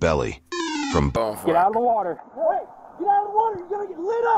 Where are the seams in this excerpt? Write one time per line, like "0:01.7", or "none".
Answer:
0:01.1